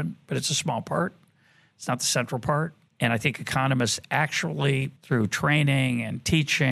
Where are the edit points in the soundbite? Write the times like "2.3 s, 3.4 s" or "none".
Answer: 2.8 s, 4.9 s